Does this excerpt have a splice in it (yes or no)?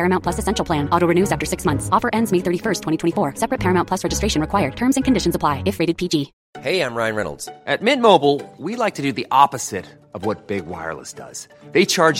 yes